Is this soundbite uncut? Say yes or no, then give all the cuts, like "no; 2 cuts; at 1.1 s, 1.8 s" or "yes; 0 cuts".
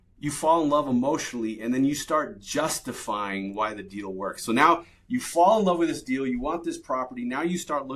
yes; 0 cuts